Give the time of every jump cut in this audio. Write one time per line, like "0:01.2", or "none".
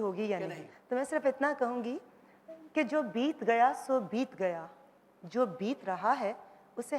none